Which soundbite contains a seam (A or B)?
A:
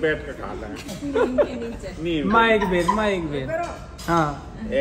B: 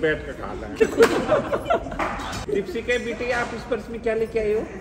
B